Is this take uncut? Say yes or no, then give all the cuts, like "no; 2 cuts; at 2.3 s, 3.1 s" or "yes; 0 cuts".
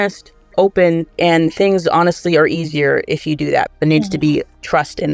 no; 2 cuts; at 1.1 s, 3.7 s